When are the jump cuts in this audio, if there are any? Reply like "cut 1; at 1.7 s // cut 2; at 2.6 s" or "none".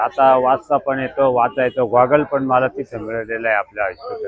none